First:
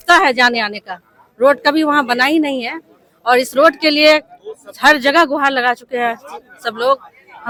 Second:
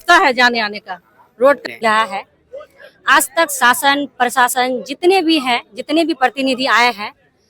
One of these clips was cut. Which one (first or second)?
second